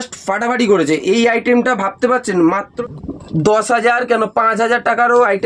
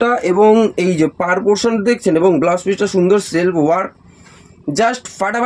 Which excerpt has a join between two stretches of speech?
first; 1 cut; at 2.6 s

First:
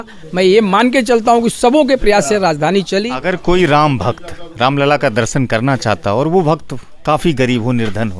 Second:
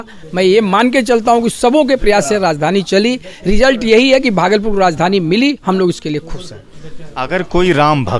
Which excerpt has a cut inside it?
first; 1 cut; at 3.1 s

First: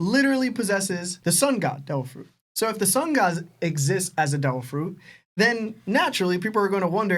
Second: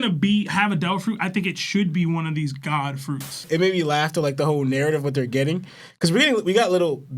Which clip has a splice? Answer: second; 1 cut; at 3.4 s

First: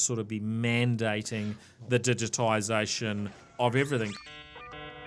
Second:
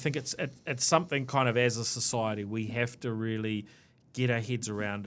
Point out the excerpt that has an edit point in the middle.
first; 2 cuts; at 3.4 s, 4.2 s

